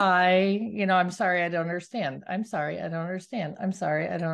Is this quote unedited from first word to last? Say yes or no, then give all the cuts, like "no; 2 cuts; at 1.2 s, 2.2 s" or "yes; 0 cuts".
yes; 0 cuts